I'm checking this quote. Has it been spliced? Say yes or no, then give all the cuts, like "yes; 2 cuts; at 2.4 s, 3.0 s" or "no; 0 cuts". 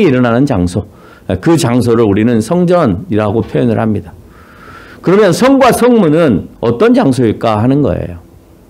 no; 0 cuts